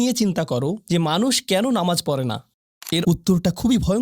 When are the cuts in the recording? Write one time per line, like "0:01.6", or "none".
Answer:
0:03.0